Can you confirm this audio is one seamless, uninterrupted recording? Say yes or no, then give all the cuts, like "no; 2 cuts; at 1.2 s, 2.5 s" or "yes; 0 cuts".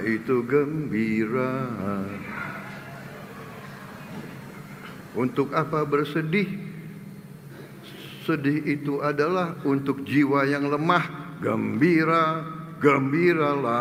yes; 0 cuts